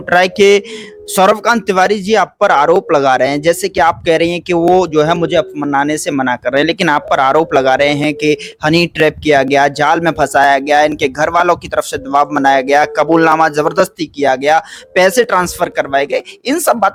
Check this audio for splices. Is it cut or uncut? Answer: uncut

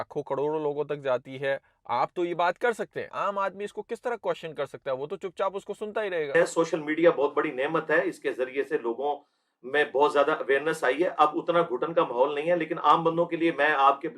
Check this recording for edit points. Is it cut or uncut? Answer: cut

